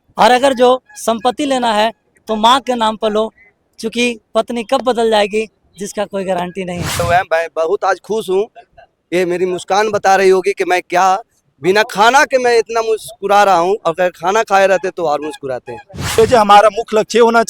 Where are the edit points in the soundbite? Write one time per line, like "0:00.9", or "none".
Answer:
0:07.0
0:16.2